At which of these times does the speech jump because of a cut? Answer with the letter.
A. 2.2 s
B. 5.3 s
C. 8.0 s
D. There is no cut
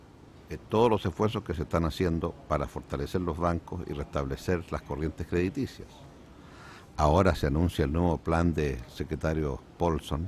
B